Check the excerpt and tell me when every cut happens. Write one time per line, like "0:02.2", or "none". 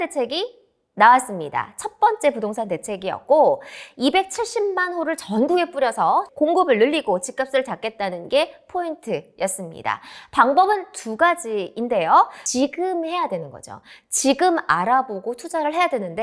0:06.3
0:12.4